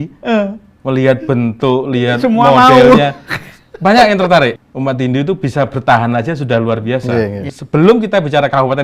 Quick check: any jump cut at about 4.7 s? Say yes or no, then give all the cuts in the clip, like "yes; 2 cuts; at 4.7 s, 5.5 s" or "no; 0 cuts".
yes; 2 cuts; at 4.7 s, 7.5 s